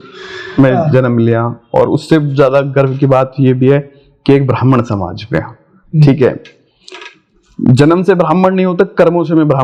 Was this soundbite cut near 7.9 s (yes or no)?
no